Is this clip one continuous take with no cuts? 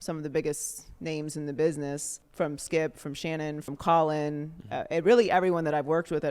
no; 2 cuts; at 2.2 s, 3.6 s

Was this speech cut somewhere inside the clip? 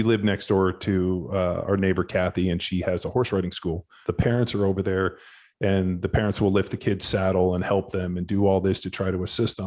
yes; 1 cut; at 3.9 s

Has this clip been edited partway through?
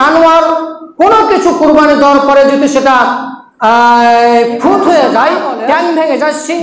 no; 0 cuts

